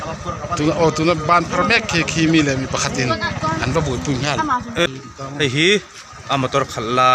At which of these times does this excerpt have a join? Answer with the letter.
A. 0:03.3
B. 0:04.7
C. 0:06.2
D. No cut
B